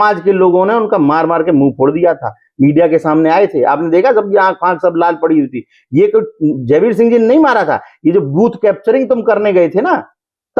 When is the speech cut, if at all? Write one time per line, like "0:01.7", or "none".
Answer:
none